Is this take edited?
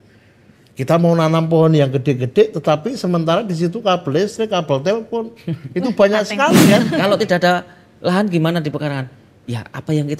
yes; 1 cut; at 6.9 s

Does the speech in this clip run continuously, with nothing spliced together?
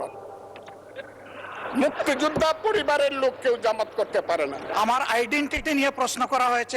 no; 1 cut; at 4.7 s

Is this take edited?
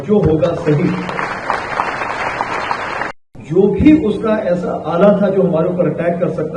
yes; 1 cut; at 3.1 s

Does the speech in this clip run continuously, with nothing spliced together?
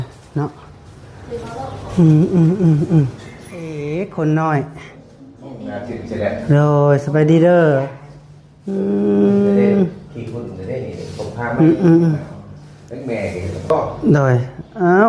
no; 1 cut; at 3.8 s

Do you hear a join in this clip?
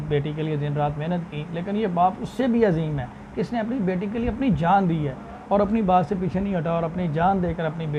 no; 0 cuts

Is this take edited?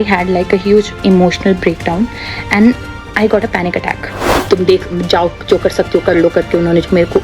yes; 1 cut; at 4.4 s

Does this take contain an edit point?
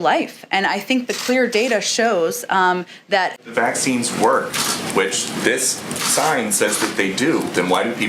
yes; 1 cut; at 3.4 s

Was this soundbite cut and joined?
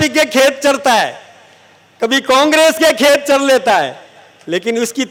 no; 0 cuts

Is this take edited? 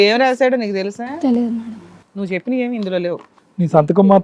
no; 0 cuts

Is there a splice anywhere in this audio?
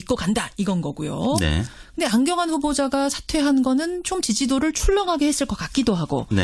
no; 0 cuts

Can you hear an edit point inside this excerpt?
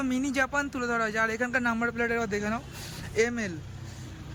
no; 0 cuts

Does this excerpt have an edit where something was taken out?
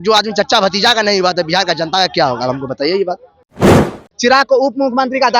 yes; 1 cut; at 3.9 s

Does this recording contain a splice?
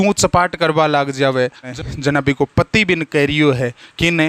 yes; 1 cut; at 1.7 s

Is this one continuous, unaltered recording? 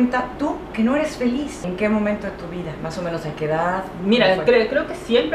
yes; 0 cuts

